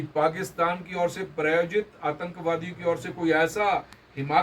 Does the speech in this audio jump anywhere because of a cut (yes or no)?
no